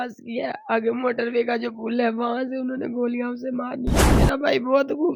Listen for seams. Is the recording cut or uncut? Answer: cut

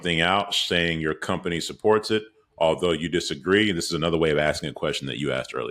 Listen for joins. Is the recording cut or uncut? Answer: uncut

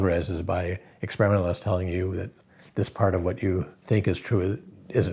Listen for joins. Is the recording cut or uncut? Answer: cut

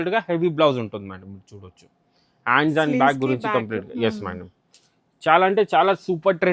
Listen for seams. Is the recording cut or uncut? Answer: uncut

